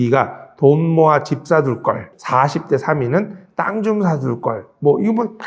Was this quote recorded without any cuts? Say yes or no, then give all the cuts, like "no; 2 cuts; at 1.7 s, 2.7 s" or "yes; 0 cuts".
no; 1 cut; at 2.1 s